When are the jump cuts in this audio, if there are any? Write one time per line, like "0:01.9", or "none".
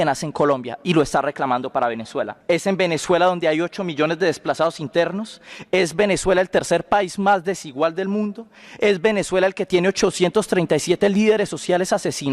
0:02.3